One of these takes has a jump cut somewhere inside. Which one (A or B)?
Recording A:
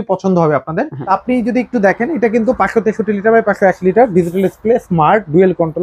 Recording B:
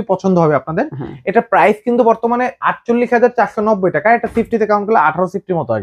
A